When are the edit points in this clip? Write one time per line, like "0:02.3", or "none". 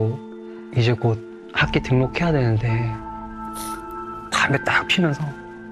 0:04.3